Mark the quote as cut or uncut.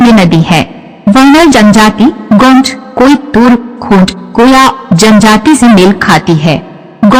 uncut